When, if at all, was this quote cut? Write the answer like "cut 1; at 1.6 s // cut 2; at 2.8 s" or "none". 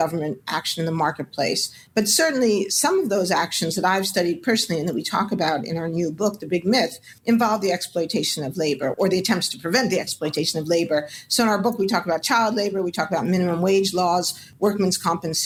none